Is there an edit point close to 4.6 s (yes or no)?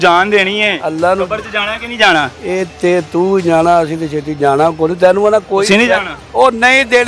no